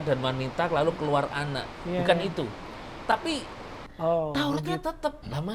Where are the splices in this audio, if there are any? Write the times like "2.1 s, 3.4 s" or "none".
3.7 s